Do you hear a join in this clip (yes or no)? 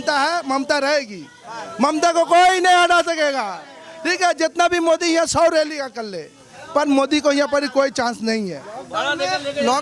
no